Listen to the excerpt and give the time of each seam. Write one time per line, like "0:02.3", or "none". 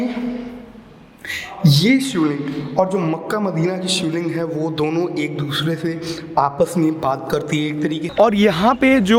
0:08.0